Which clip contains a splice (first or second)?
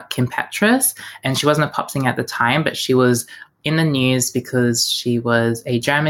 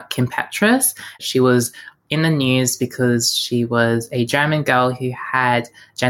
second